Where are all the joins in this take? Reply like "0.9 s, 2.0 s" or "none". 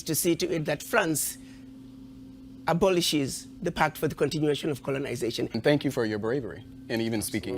5.6 s